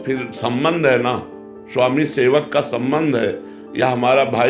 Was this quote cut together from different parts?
no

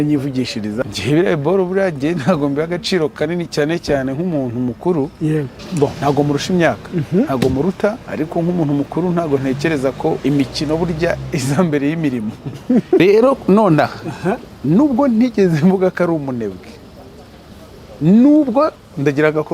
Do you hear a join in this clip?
yes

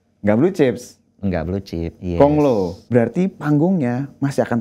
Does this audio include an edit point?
yes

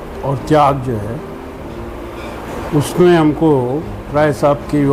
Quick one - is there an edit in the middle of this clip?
no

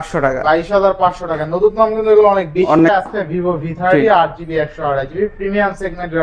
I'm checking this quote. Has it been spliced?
yes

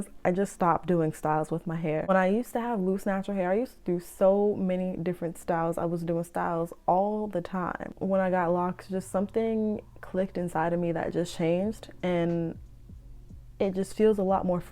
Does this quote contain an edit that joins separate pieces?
yes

